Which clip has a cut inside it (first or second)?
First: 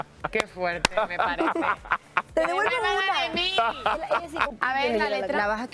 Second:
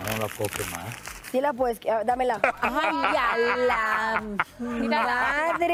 first